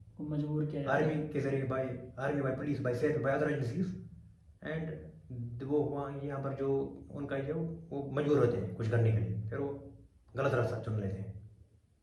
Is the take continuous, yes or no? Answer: yes